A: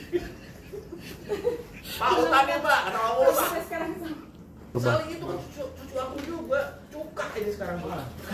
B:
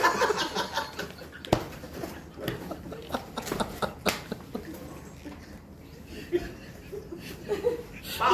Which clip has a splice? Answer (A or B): A